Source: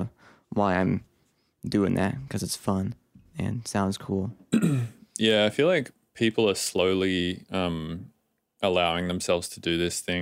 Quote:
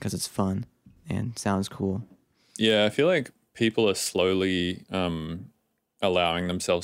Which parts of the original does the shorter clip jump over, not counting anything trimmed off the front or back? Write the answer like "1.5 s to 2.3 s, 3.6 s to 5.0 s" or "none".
4.5 s to 4.8 s